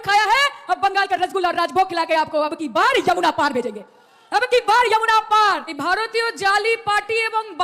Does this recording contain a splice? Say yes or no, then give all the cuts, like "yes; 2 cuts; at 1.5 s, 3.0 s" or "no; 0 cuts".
yes; 1 cut; at 5.7 s